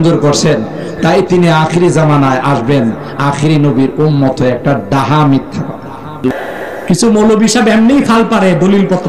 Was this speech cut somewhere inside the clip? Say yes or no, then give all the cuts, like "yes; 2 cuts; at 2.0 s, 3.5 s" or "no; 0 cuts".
yes; 1 cut; at 6.3 s